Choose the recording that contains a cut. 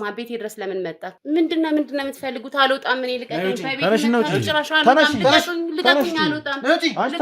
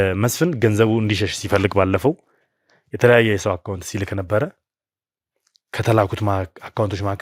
first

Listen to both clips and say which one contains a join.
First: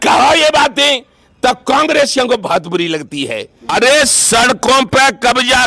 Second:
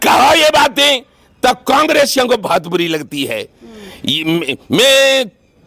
first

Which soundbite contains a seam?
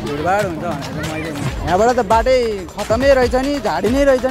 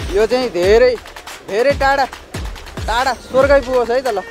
first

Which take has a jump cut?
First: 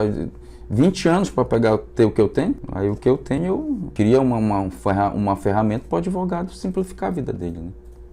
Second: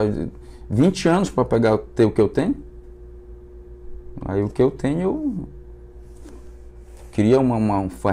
first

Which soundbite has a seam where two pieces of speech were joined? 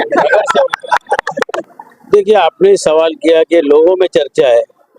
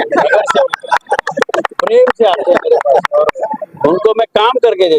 first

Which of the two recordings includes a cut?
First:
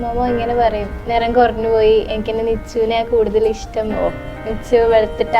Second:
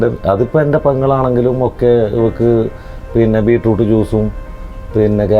first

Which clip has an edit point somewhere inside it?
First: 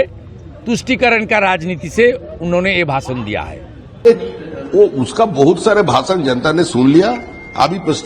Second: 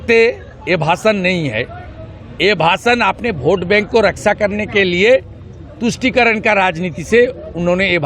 first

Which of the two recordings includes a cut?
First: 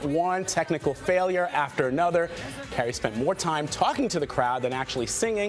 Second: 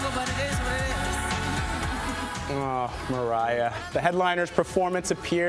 second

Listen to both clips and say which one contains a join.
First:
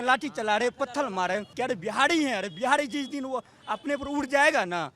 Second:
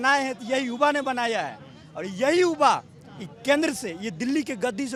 first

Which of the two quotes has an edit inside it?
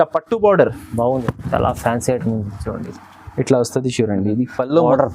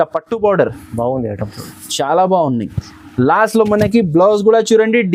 first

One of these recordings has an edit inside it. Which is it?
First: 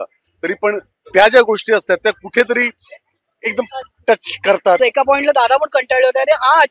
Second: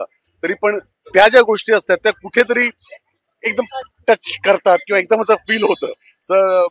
first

